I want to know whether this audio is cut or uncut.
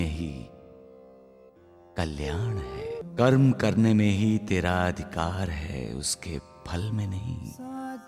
cut